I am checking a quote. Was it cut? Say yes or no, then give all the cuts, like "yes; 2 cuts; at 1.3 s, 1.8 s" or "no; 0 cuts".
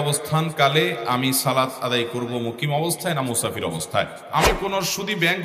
yes; 1 cut; at 4.2 s